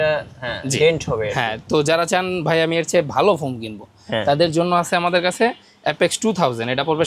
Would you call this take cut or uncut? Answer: uncut